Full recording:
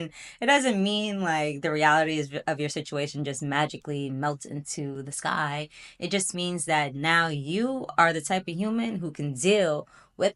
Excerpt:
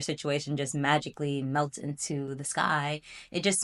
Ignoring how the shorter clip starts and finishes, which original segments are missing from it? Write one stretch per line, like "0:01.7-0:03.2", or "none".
none